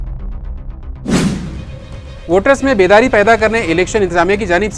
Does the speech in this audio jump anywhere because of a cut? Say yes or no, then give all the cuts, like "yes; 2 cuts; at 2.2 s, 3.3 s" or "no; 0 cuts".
yes; 1 cut; at 1.6 s